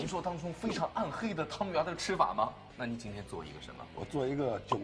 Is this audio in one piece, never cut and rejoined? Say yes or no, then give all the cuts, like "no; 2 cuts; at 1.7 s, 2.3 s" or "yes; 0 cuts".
no; 2 cuts; at 2.6 s, 3.8 s